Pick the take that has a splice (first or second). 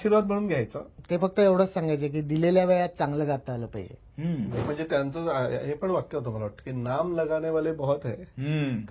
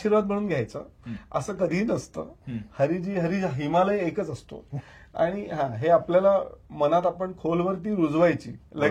first